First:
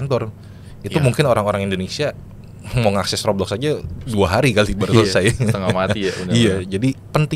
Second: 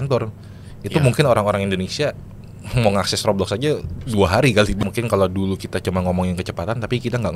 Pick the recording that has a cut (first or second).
second